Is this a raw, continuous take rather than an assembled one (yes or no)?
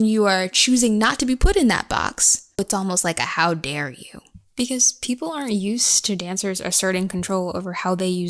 yes